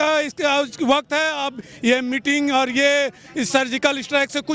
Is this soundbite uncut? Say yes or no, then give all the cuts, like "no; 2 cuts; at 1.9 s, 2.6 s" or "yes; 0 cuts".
yes; 0 cuts